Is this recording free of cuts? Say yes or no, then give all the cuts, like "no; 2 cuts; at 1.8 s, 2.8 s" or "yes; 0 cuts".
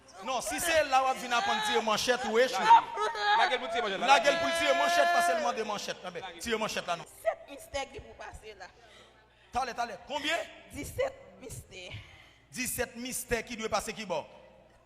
no; 1 cut; at 7.1 s